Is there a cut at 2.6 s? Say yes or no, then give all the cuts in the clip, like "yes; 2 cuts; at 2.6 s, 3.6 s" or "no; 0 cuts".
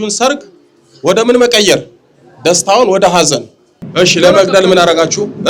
no; 1 cut; at 3.8 s